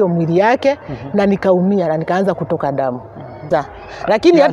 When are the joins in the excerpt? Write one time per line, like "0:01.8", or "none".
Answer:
0:03.4